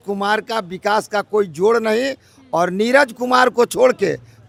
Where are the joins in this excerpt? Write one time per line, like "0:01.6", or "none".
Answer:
none